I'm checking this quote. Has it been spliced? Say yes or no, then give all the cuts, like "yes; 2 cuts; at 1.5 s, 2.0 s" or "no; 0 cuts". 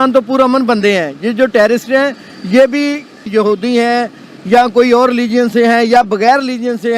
no; 0 cuts